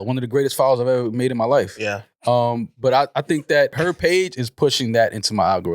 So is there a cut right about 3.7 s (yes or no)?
yes